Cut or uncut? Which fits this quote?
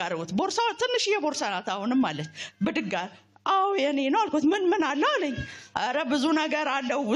uncut